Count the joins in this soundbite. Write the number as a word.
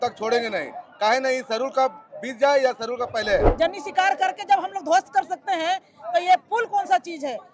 one